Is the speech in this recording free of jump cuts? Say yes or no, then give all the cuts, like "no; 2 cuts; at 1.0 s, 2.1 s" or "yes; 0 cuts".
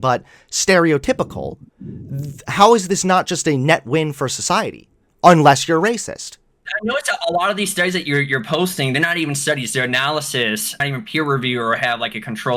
no; 2 cuts; at 6.7 s, 10.8 s